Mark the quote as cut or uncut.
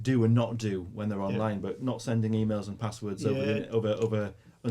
uncut